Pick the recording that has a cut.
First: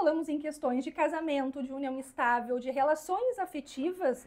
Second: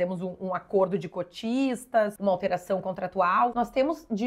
second; 2 cuts; at 2.2 s, 3.5 s

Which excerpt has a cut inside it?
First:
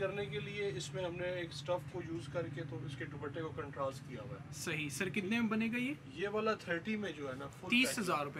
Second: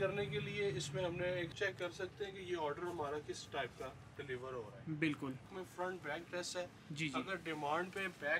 second; 2 cuts; at 1.5 s, 5.5 s

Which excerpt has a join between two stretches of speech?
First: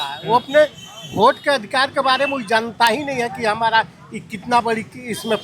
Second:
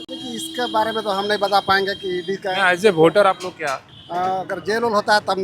second; 1 cut; at 3.9 s

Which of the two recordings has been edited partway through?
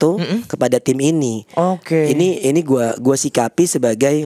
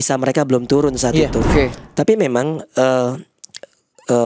second; 1 cut; at 1.5 s

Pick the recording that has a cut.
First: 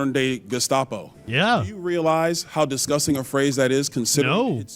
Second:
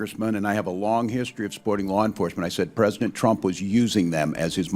first; 1 cut; at 1.1 s

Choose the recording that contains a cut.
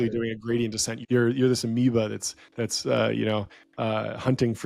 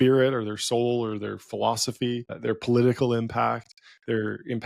first; 1 cut; at 0.9 s

